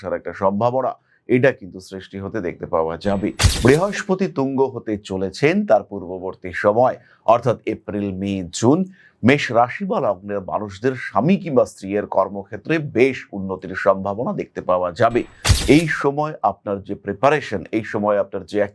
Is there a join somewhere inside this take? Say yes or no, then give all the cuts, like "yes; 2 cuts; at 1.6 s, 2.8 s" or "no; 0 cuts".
yes; 2 cuts; at 3.5 s, 15.4 s